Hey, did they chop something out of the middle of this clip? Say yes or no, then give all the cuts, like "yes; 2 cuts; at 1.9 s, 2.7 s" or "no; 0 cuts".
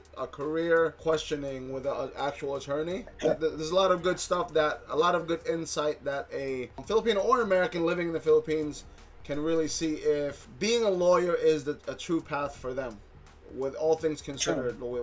no; 0 cuts